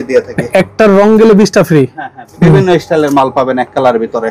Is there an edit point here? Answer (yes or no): yes